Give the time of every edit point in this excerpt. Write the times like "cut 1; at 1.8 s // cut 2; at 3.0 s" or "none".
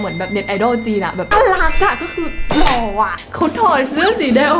cut 1; at 1.3 s // cut 2; at 3.1 s